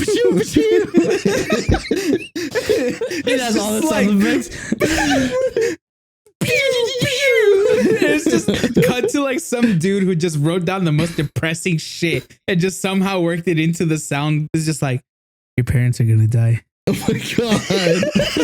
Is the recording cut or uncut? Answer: cut